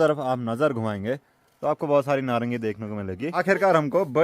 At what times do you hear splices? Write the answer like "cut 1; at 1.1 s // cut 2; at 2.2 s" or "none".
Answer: cut 1; at 3.3 s